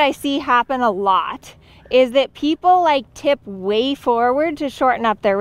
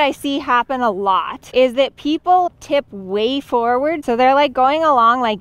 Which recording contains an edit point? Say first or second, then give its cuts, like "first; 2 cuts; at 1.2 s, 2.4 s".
second; 3 cuts; at 1.4 s, 2.5 s, 4.0 s